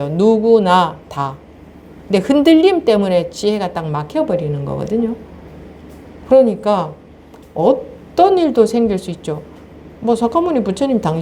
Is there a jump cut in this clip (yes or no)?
no